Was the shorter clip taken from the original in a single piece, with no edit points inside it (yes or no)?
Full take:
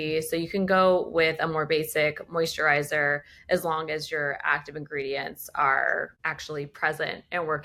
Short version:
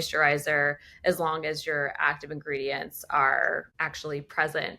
yes